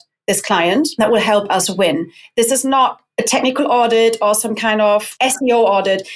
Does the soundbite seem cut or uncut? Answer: cut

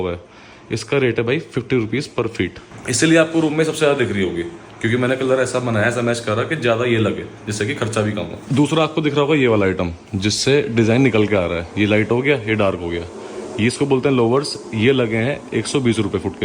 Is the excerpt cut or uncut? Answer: uncut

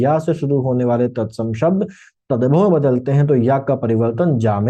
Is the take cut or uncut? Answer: uncut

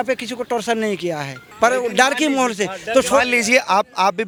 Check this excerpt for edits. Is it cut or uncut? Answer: uncut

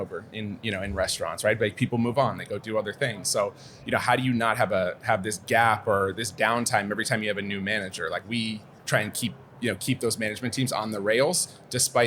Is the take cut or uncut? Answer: uncut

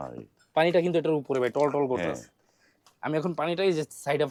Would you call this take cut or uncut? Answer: uncut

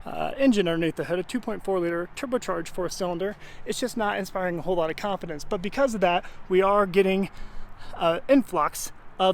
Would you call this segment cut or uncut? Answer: uncut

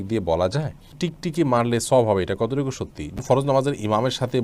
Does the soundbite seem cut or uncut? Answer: cut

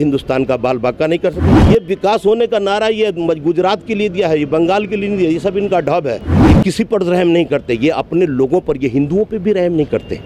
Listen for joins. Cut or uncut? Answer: cut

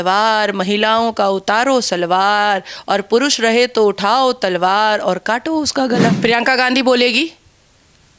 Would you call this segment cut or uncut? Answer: cut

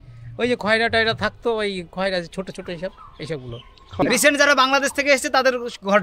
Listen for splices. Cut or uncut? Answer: cut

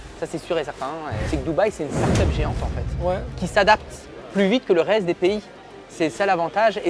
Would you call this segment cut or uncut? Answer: cut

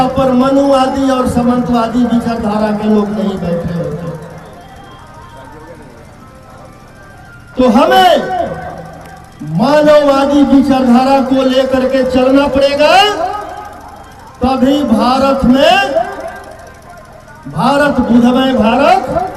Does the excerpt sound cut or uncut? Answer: uncut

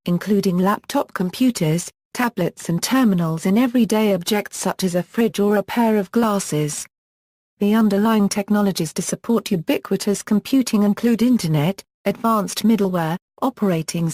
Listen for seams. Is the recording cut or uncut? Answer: cut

